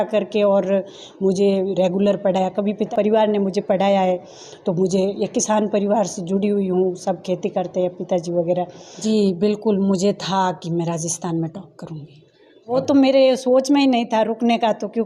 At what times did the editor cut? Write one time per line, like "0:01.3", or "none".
0:02.9
0:09.0
0:12.7